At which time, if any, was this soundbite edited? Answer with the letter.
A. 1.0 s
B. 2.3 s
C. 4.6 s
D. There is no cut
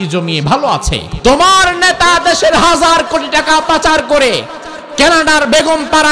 A